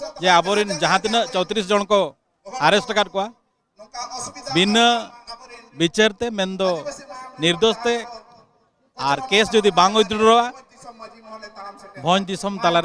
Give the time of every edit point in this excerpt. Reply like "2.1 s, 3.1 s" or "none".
none